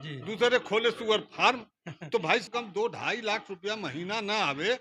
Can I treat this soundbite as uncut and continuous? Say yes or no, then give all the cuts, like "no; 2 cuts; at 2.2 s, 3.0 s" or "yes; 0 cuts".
no; 1 cut; at 2.5 s